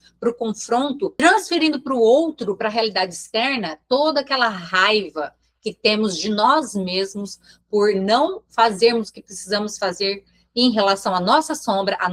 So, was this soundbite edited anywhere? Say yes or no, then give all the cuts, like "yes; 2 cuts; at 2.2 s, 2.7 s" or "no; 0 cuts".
no; 0 cuts